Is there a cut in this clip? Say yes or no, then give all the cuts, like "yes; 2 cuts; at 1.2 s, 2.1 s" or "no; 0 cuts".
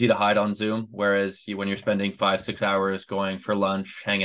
no; 0 cuts